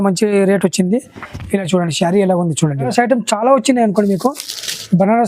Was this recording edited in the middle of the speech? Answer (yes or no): yes